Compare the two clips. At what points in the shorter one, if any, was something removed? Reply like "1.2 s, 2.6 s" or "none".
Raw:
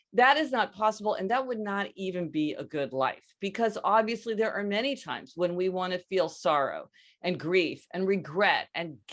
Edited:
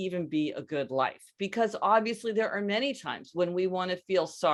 none